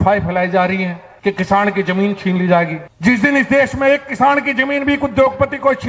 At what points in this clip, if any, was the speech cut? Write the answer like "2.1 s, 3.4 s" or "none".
1.0 s, 2.8 s